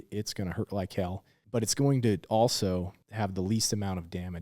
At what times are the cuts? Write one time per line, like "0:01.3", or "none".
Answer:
0:01.3
0:03.0